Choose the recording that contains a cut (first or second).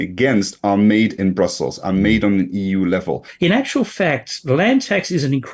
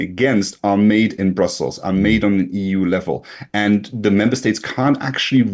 first